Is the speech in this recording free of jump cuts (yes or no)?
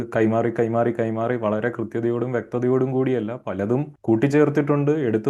yes